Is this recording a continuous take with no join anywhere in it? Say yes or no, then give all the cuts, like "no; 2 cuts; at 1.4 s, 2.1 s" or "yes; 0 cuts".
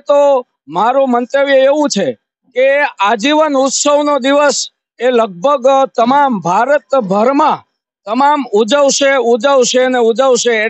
yes; 0 cuts